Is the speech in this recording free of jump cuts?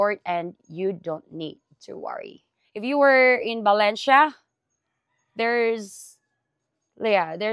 no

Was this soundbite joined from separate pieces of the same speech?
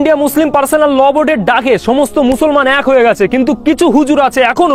no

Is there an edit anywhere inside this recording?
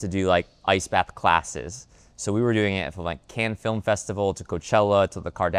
no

